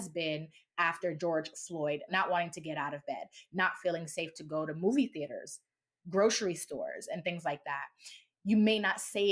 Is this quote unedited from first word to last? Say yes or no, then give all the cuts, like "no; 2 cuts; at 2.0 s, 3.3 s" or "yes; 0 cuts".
no; 2 cuts; at 1.2 s, 2.0 s